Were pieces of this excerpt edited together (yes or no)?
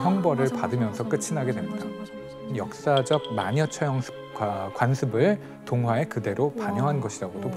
yes